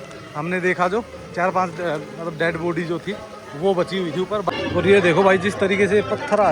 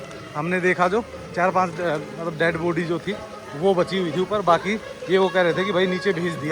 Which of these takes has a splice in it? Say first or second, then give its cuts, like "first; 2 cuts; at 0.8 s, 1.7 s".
first; 1 cut; at 4.5 s